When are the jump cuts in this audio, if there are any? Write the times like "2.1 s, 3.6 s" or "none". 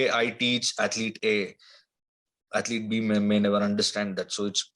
none